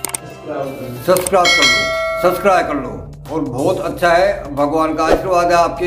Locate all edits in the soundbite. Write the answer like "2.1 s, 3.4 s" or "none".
1.9 s